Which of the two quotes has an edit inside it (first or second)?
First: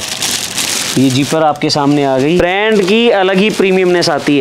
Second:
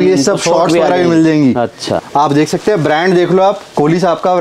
first